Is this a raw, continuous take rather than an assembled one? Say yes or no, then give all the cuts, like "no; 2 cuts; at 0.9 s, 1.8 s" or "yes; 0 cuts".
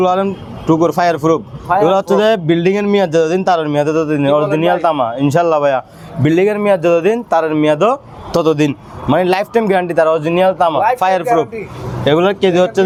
yes; 0 cuts